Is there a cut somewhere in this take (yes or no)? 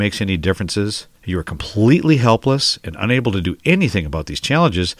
yes